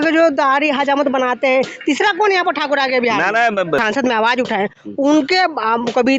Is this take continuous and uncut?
no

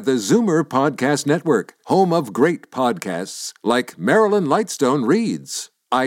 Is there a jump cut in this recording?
no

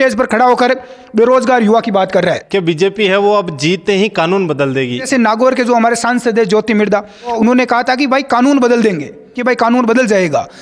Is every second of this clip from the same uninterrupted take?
no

